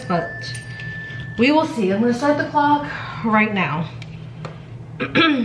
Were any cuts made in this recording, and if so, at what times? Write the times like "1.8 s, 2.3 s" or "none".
none